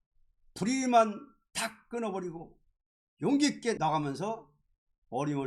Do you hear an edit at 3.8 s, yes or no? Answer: yes